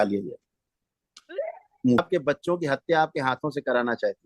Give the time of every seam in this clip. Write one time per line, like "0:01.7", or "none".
0:02.0